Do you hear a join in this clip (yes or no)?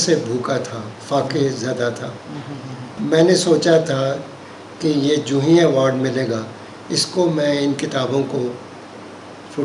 yes